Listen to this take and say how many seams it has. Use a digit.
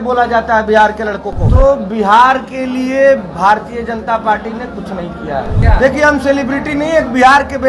2